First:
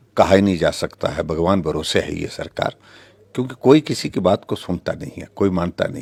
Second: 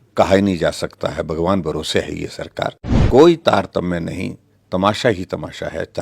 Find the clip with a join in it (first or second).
second